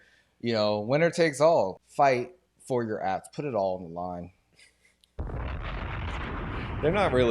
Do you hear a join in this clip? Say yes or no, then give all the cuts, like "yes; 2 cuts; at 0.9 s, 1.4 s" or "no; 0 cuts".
yes; 1 cut; at 1.8 s